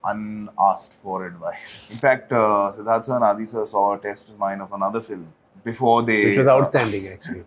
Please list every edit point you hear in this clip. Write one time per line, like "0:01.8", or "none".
0:01.8